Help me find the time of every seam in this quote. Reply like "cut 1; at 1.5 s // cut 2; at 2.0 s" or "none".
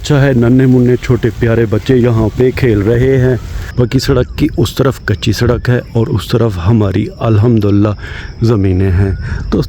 cut 1; at 3.6 s